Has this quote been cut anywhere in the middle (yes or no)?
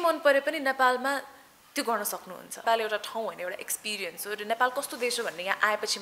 yes